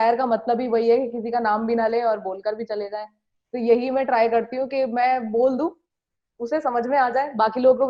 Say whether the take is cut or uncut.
uncut